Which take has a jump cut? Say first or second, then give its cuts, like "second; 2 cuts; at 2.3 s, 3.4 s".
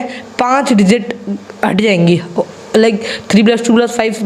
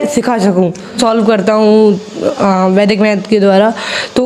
second; 1 cut; at 1.0 s